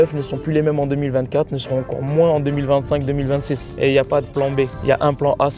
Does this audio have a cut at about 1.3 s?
no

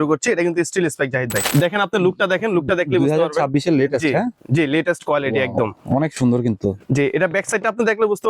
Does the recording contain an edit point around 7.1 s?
no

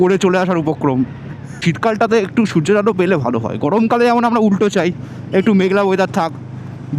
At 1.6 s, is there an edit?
yes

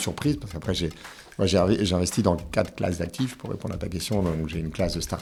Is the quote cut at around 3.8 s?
no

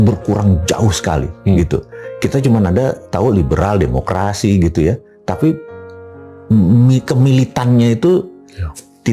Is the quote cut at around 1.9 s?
no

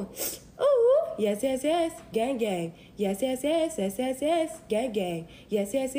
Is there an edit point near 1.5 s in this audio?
yes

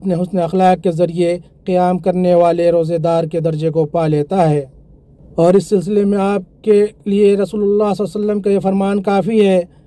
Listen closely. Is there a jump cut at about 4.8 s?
no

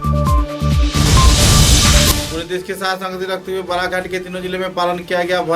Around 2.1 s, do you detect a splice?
yes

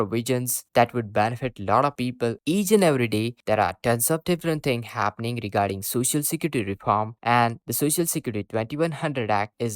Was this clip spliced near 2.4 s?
yes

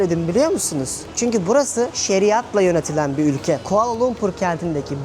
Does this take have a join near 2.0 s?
yes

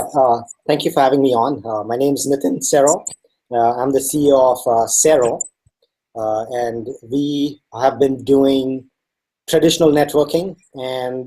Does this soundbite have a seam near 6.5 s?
yes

